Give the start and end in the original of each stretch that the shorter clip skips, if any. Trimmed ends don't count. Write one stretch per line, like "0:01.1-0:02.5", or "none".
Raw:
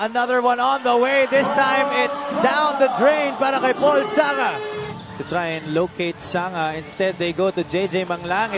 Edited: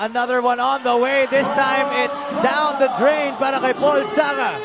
none